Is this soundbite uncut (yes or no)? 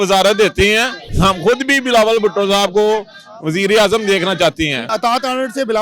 no